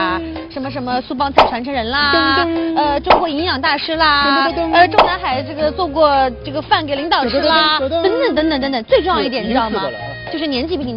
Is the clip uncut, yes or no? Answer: no